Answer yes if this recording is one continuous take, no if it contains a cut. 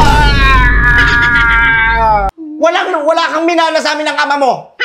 no